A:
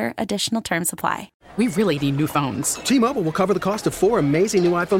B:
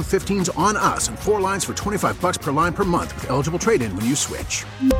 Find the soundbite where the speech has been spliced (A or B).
A